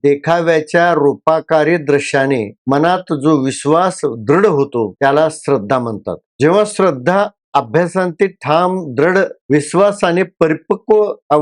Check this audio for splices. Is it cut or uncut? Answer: uncut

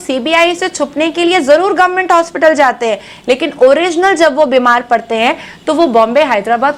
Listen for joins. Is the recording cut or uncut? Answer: uncut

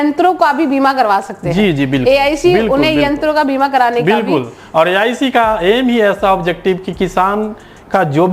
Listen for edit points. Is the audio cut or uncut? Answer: uncut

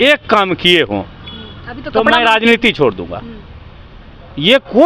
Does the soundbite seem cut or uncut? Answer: uncut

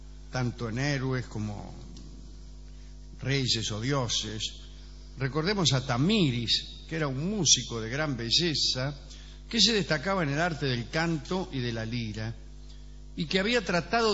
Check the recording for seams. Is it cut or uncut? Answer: uncut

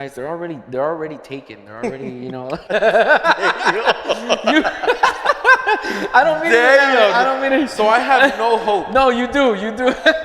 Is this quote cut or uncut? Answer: uncut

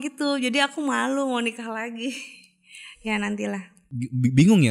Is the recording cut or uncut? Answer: uncut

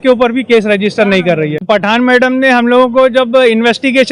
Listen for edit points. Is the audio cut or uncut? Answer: cut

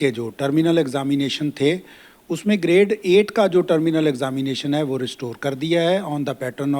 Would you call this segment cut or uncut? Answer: uncut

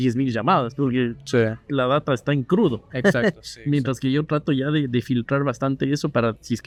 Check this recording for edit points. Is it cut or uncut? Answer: uncut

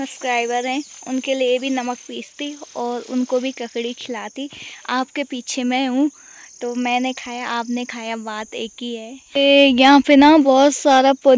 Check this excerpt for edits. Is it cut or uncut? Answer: uncut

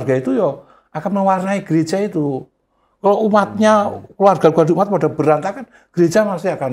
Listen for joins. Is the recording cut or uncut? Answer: uncut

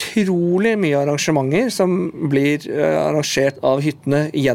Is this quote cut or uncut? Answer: cut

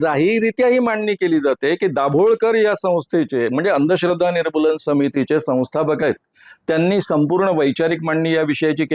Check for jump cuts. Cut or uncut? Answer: uncut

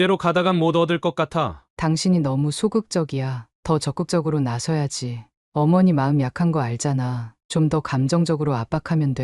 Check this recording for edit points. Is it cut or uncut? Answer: cut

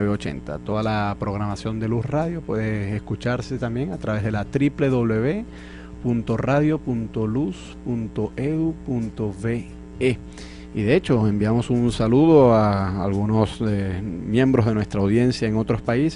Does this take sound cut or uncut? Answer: uncut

